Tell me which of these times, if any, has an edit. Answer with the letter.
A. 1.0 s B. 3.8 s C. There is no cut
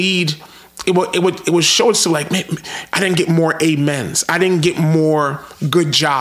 C